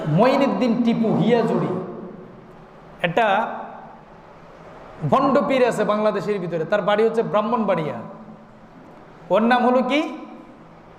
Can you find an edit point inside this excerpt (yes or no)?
no